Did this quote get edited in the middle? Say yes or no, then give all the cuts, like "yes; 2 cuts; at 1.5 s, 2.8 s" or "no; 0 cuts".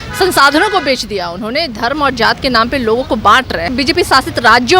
yes; 1 cut; at 3.7 s